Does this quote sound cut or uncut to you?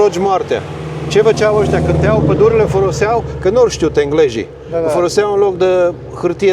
uncut